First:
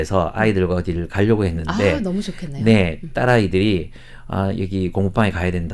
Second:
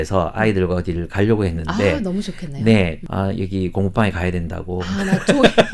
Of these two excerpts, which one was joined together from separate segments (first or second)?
second